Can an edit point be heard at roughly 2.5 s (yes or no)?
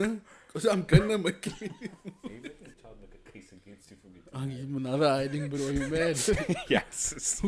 yes